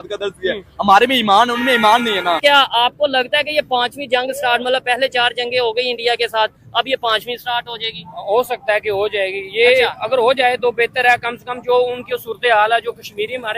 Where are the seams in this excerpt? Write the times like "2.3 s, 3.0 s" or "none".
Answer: 2.4 s